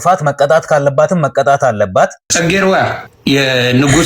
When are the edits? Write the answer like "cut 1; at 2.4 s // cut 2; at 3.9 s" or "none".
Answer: cut 1; at 2.3 s // cut 2; at 3.1 s